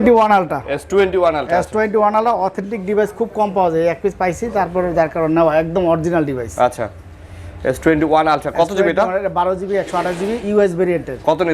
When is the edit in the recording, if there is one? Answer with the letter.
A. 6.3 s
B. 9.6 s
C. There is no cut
C